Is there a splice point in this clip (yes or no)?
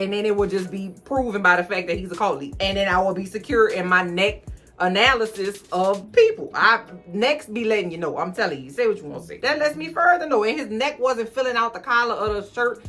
yes